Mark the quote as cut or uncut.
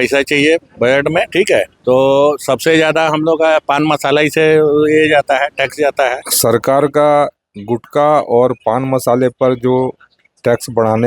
cut